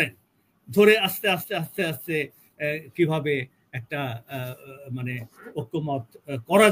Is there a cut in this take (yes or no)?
no